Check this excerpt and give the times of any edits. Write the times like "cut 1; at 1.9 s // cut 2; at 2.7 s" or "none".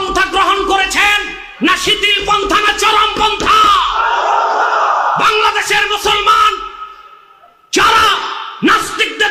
none